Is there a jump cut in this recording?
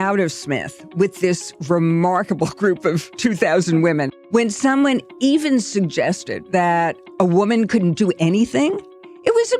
yes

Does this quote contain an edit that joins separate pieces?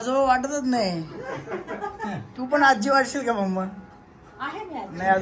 no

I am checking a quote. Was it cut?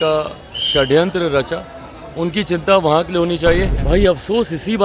yes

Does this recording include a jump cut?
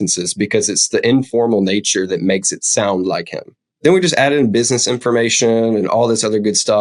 no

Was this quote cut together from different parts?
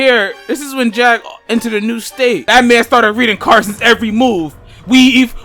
yes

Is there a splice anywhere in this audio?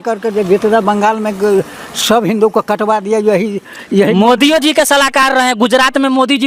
no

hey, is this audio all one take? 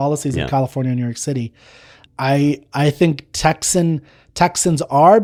yes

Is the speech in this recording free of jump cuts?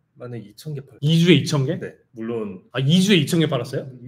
no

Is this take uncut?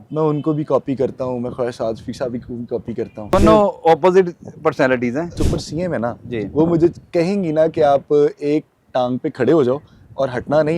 no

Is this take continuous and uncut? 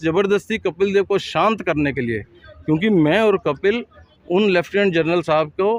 yes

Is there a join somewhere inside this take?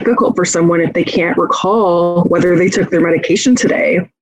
no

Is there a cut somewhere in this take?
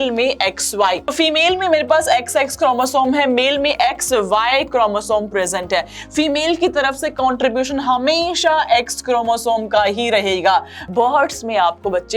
yes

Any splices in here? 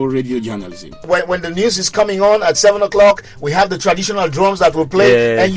yes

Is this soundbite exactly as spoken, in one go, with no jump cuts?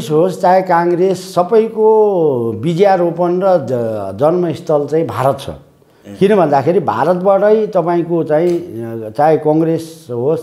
yes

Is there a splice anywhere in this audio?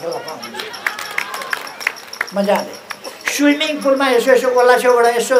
no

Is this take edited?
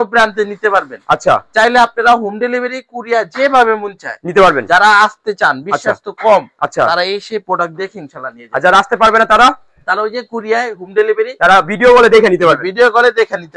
no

